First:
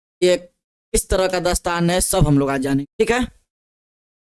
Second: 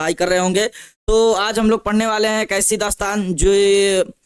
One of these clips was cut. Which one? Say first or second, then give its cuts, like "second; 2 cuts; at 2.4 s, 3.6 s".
second; 1 cut; at 1.5 s